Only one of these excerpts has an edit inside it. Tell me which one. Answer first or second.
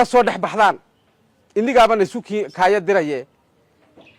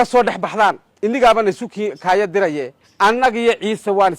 second